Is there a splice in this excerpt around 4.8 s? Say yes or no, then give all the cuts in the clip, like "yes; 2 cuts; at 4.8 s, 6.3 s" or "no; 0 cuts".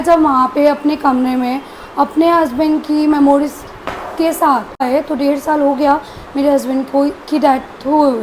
yes; 1 cut; at 4.8 s